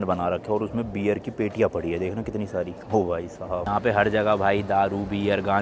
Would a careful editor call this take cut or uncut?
uncut